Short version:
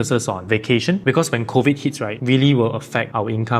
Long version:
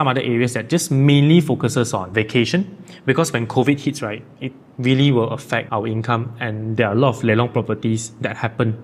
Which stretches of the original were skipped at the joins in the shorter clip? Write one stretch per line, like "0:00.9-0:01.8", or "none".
0:02.7-0:03.0
0:04.1-0:04.7